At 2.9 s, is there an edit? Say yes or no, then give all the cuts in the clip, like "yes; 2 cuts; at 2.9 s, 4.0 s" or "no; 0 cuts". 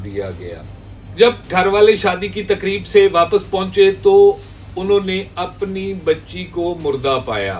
no; 0 cuts